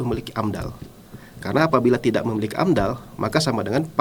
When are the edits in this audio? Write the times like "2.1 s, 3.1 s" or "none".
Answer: none